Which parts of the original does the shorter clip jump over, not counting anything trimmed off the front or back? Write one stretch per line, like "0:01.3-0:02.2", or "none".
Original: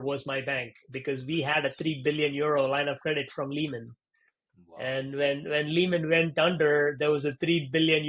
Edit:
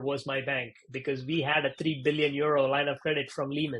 none